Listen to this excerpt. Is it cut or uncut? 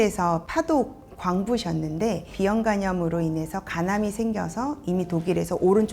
cut